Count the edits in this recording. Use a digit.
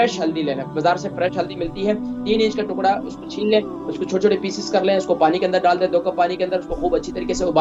0